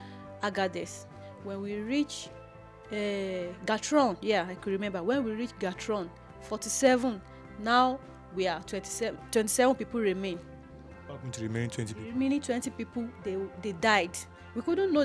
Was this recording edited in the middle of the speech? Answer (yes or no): no